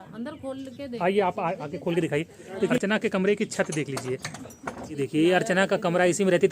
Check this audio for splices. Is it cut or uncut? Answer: cut